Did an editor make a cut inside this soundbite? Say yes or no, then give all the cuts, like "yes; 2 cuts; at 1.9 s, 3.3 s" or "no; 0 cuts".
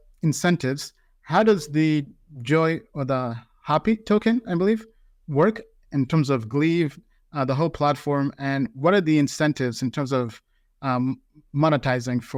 no; 0 cuts